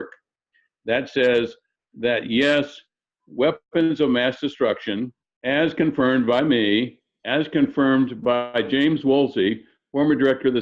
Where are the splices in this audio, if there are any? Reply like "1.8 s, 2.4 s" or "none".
5.2 s